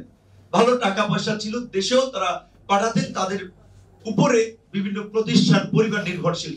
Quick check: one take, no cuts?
yes; 0 cuts

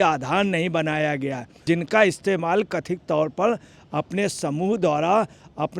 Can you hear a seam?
yes; 1 cut; at 1.5 s

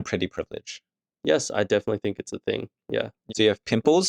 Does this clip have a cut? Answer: yes; 1 cut; at 3.2 s

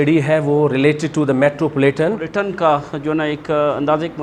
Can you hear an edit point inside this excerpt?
yes; 1 cut; at 2.3 s

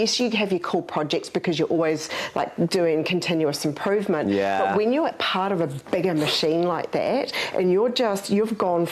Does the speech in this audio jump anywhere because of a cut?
no; 0 cuts

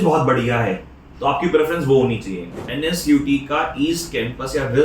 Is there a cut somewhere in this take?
yes; 1 cut; at 2.6 s

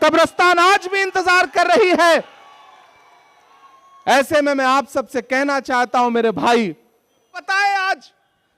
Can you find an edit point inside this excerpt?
yes; 1 cut; at 7.4 s

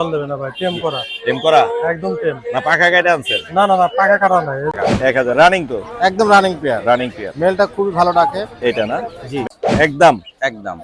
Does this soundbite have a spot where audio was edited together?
yes; 2 cuts; at 4.7 s, 9.4 s

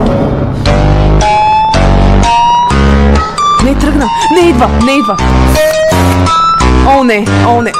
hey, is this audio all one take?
yes; 0 cuts

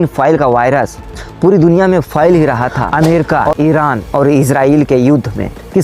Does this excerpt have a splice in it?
yes; 1 cut; at 2.8 s

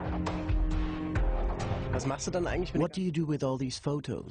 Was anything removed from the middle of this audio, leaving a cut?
yes; 1 cut; at 1.7 s

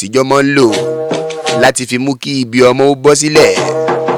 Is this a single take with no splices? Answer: yes; 0 cuts

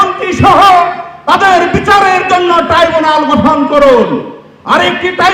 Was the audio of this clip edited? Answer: no; 0 cuts

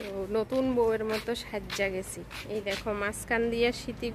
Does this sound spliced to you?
no; 0 cuts

